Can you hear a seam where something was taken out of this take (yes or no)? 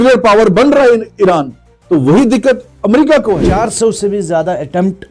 yes